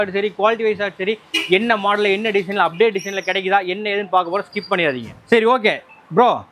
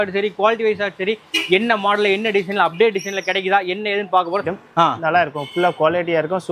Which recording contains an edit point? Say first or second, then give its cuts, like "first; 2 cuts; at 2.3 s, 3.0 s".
second; 1 cut; at 4.5 s